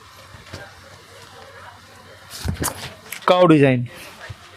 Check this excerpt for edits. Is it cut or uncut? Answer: cut